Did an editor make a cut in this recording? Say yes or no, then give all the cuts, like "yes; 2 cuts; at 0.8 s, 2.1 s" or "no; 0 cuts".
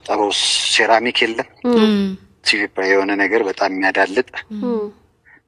no; 0 cuts